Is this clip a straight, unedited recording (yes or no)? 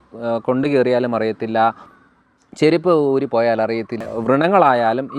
no